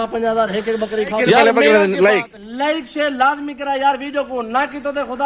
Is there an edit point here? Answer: yes; 1 cut; at 1.4 s

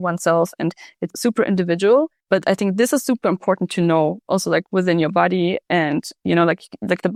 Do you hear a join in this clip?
no; 0 cuts

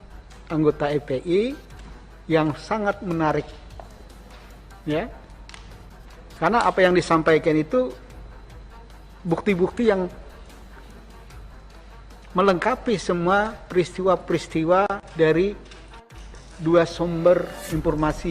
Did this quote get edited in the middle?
no; 0 cuts

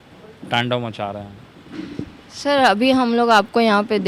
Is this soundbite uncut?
yes; 0 cuts

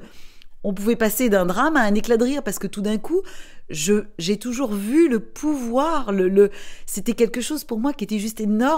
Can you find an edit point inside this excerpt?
no; 0 cuts

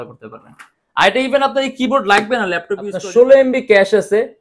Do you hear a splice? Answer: yes; 1 cut; at 2.9 s

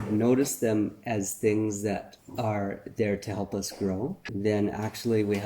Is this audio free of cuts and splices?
no; 2 cuts; at 2.2 s, 4.2 s

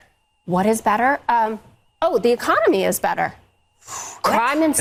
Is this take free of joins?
yes; 0 cuts

